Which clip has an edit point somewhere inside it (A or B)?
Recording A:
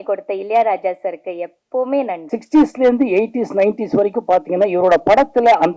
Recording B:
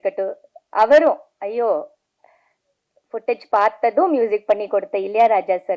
A